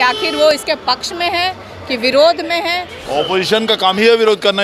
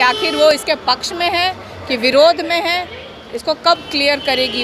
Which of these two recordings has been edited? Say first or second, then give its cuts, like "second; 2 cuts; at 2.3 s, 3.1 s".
first; 1 cut; at 3.0 s